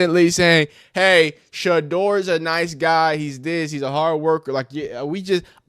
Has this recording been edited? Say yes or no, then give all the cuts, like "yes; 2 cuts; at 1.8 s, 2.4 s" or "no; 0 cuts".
no; 0 cuts